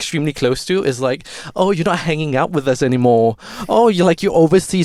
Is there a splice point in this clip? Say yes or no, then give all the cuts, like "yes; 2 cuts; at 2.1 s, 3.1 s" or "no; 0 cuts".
no; 0 cuts